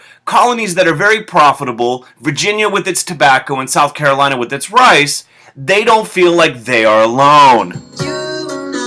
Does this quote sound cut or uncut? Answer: cut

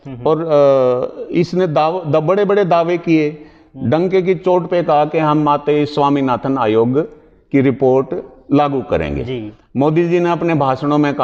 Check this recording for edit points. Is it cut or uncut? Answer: uncut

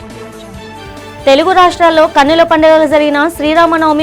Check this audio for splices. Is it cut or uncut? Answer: uncut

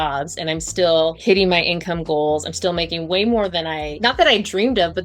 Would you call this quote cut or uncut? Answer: cut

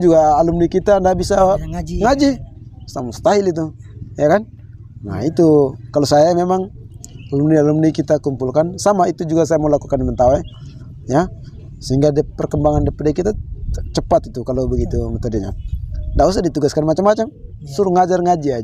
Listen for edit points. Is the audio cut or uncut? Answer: uncut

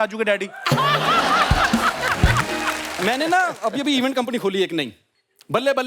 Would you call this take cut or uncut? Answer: cut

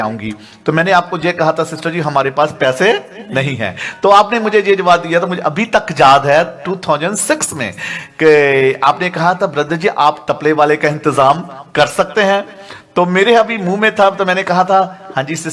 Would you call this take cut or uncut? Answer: uncut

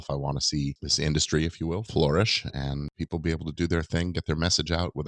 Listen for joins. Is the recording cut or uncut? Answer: cut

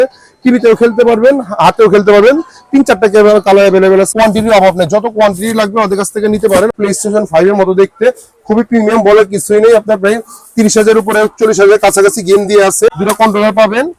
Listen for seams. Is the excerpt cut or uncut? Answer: cut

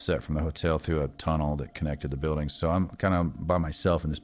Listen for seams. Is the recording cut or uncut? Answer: uncut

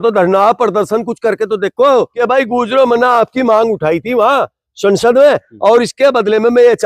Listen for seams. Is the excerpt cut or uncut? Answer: cut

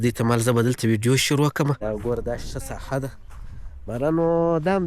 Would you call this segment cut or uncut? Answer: cut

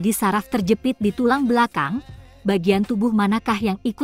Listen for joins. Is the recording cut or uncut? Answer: uncut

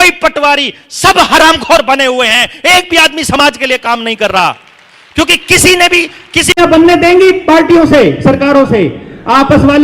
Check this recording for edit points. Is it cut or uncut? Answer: cut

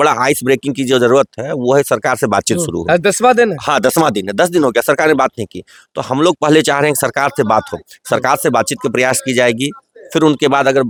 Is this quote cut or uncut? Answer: uncut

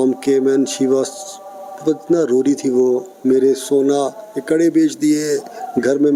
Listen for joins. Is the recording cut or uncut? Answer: uncut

